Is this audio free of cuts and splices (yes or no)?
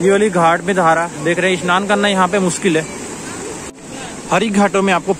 no